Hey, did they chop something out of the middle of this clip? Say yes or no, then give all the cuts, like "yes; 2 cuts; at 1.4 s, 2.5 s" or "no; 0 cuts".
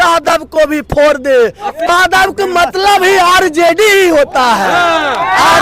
yes; 1 cut; at 1.9 s